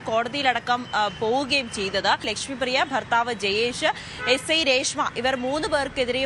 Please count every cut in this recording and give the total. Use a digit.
1